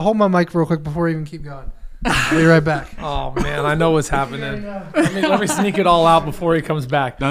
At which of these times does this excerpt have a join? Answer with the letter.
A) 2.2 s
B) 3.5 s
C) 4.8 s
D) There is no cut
D